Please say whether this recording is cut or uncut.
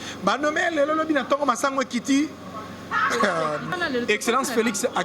cut